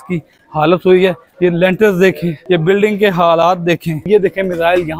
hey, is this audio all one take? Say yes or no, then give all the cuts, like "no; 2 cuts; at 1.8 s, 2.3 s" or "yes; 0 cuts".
no; 3 cuts; at 1.3 s, 2.3 s, 4.1 s